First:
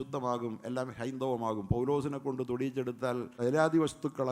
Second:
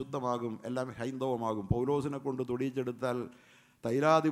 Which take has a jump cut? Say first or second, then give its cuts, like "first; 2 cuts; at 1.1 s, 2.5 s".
first; 1 cut; at 3.3 s